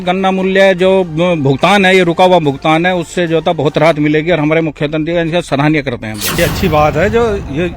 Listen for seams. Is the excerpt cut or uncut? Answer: cut